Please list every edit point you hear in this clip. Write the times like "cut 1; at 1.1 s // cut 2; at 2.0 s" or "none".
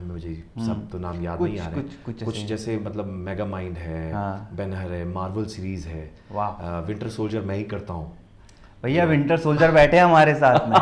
none